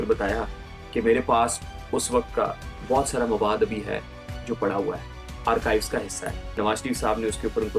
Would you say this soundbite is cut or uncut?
cut